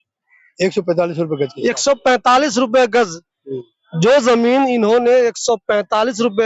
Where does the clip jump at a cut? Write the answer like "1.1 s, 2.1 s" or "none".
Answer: none